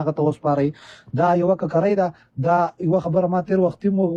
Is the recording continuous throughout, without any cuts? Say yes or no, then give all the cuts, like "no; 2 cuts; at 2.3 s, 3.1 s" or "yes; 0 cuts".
yes; 0 cuts